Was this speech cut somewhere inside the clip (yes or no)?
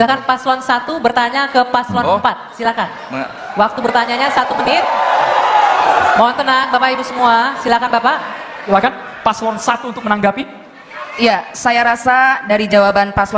yes